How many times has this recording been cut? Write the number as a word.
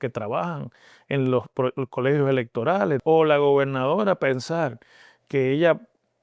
one